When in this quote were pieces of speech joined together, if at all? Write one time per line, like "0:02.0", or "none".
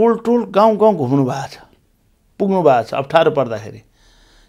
none